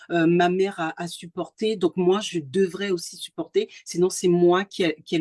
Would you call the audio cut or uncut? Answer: uncut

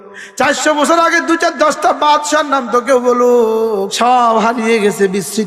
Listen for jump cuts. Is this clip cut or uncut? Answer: cut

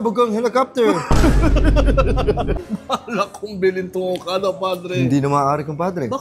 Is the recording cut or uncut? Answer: cut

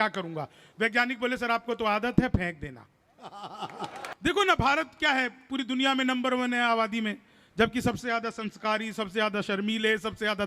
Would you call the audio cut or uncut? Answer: cut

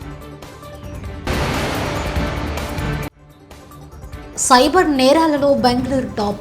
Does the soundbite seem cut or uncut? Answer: cut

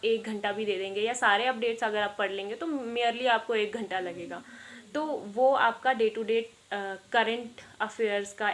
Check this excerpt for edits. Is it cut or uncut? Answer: uncut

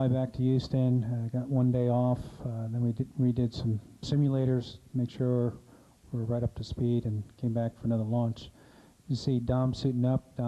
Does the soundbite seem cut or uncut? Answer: cut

